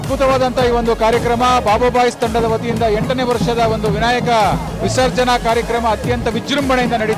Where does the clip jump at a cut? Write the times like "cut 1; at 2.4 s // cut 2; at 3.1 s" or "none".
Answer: none